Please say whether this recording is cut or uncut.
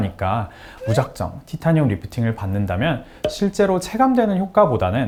uncut